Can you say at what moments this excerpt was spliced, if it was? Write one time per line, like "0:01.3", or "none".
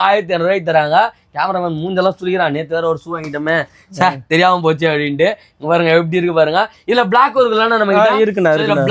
none